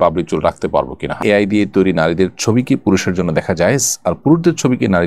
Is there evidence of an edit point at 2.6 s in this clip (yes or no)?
no